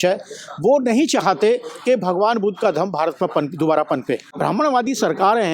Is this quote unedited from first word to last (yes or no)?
no